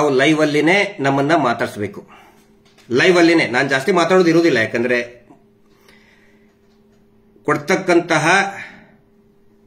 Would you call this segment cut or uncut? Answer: uncut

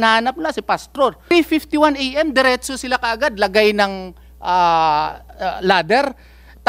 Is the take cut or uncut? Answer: cut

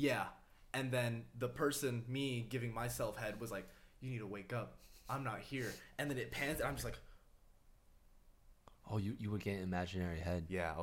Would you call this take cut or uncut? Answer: uncut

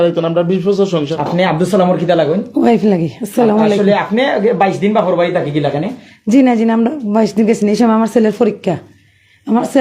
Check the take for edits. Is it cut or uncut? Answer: cut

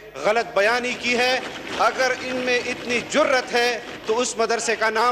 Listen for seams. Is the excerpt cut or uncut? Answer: uncut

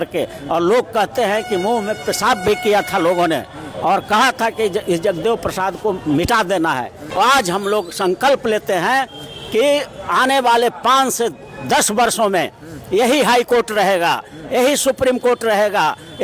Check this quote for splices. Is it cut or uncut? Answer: cut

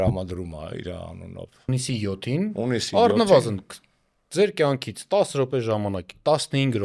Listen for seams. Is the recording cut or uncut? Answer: cut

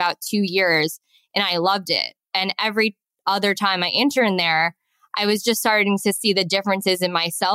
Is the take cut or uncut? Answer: uncut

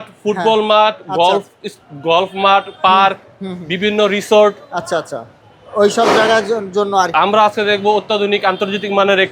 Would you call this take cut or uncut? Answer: uncut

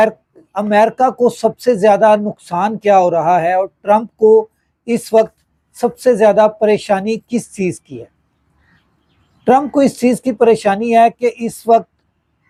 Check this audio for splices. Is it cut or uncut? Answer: uncut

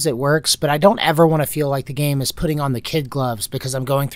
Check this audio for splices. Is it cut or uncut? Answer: uncut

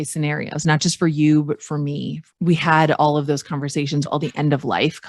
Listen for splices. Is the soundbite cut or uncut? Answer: cut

